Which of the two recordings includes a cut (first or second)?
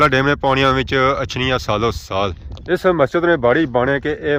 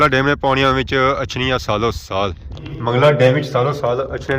second